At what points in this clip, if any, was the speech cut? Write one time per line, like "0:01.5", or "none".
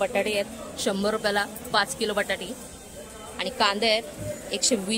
none